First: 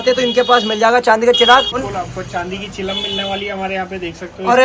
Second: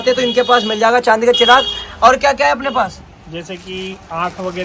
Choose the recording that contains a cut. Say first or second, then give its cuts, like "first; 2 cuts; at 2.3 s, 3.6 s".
first; 1 cut; at 1.8 s